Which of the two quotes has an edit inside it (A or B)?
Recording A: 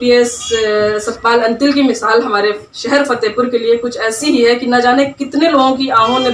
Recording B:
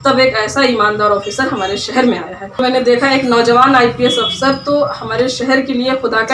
B